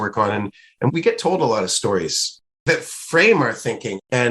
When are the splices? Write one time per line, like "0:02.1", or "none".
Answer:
0:02.6

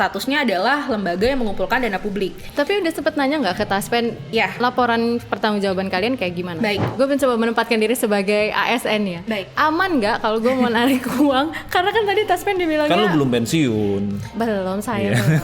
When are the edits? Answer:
0:02.4
0:06.8

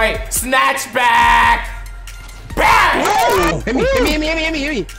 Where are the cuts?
0:03.5

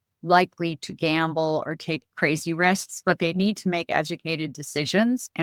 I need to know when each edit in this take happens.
none

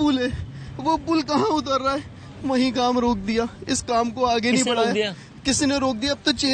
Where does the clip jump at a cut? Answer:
none

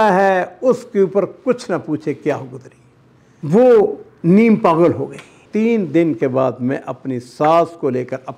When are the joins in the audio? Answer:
0:05.4

